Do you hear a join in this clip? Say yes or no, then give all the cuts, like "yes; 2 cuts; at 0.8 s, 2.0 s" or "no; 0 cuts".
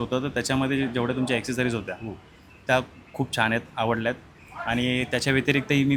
no; 0 cuts